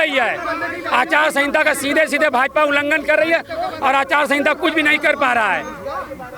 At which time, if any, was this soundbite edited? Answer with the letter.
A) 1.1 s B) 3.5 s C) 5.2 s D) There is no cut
D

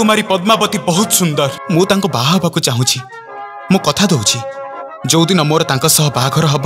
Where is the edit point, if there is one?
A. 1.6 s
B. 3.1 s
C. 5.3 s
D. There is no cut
A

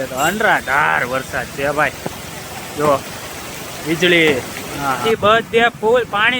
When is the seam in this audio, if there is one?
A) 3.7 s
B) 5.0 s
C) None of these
B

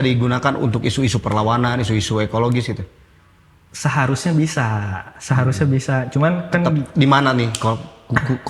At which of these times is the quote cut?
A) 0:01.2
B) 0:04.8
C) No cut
C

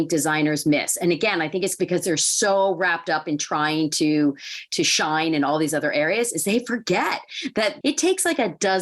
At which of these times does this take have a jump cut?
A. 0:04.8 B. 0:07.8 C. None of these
B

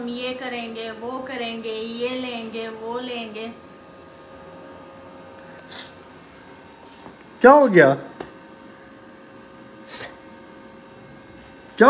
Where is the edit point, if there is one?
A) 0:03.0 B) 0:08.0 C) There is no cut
C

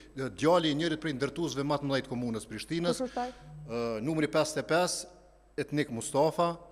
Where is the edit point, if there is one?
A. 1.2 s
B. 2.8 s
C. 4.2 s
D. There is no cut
D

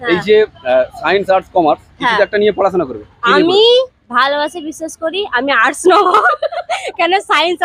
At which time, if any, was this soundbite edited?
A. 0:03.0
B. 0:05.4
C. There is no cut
C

